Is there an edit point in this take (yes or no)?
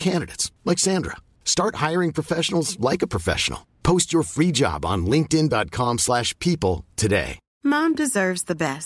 yes